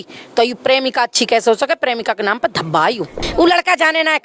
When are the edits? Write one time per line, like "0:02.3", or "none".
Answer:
0:03.2